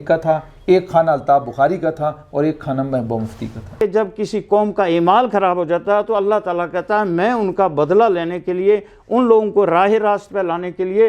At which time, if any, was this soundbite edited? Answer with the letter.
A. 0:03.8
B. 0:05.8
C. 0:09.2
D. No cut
A